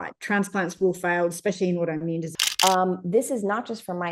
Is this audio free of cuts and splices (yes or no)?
no